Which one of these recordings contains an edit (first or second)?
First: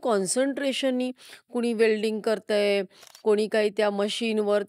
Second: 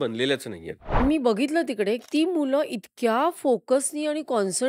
second